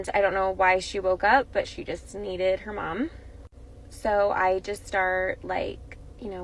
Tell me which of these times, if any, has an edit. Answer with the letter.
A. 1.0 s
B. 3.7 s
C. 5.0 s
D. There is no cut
D